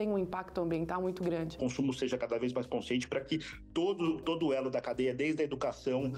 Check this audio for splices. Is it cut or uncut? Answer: cut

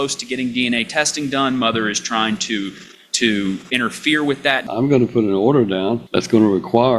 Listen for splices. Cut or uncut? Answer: cut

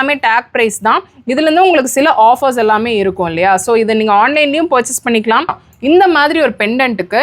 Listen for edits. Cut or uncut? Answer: cut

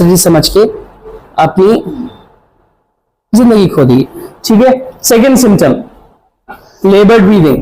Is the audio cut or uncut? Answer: uncut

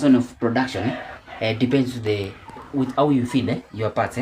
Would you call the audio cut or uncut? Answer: uncut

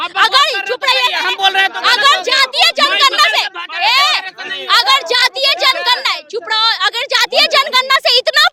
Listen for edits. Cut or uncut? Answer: uncut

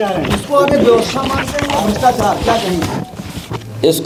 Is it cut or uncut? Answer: uncut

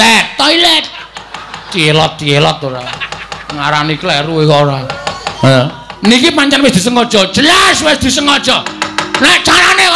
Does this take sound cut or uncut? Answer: cut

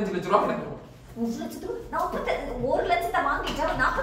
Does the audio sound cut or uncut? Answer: uncut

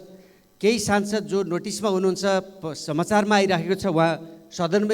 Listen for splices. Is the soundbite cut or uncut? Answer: uncut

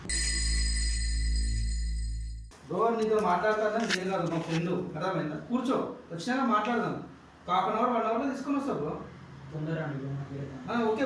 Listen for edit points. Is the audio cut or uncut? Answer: cut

